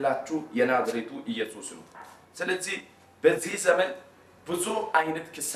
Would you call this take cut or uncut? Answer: uncut